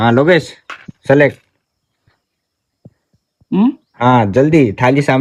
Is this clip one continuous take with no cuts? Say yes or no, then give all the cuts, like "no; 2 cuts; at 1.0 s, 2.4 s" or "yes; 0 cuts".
yes; 0 cuts